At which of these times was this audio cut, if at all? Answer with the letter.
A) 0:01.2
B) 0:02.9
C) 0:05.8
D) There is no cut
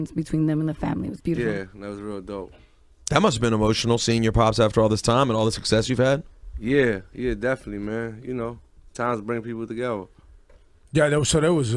A